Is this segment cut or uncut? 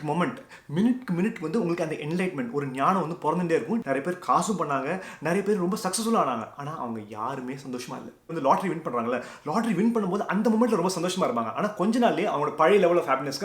cut